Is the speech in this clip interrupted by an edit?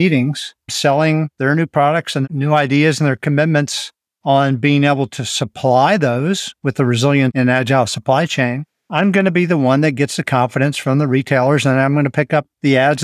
no; 0 cuts

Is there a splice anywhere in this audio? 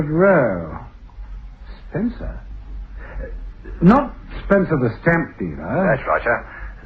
no; 0 cuts

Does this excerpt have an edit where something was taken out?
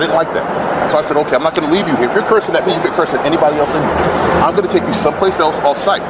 no; 0 cuts

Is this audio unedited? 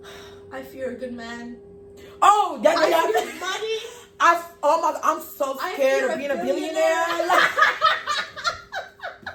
yes; 0 cuts

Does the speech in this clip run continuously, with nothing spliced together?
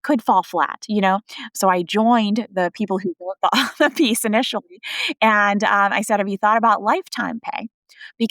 no; 1 cut; at 1.5 s

